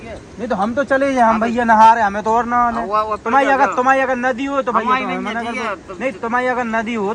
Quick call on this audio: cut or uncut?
uncut